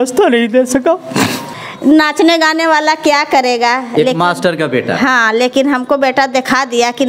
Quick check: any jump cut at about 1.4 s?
yes; 1 cut; at 1.4 s

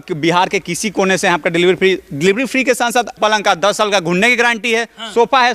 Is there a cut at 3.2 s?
yes; 1 cut; at 3.2 s

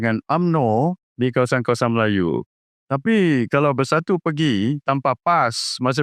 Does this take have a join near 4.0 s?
no; 2 cuts; at 1.0 s, 2.6 s

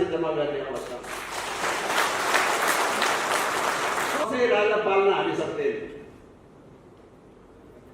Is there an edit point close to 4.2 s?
yes; 1 cut; at 4.2 s

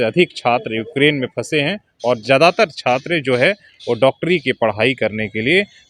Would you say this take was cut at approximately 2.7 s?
no; 0 cuts

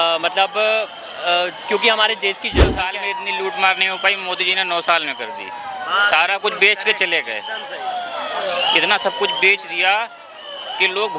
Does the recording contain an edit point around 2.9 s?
yes; 1 cut; at 2.9 s

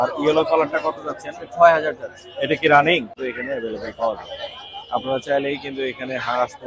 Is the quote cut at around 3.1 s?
yes; 1 cut; at 3.1 s

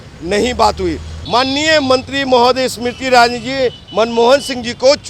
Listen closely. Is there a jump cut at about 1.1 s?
yes; 1 cut; at 1.1 s

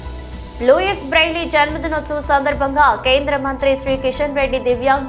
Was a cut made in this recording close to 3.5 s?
no; 0 cuts

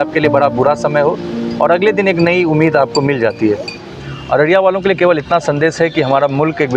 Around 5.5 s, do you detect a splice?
no; 1 cut; at 4.0 s

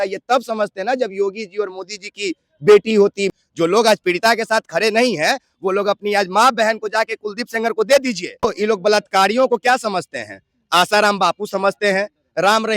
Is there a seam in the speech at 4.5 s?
no; 2 cuts; at 3.3 s, 8.4 s

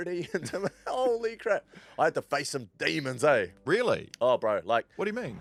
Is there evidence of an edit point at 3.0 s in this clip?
no; 0 cuts

